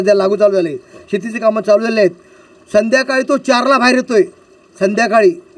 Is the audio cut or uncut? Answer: uncut